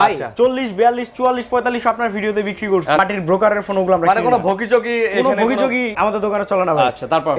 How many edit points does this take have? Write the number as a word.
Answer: two